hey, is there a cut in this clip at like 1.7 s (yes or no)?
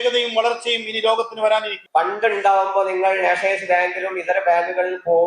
yes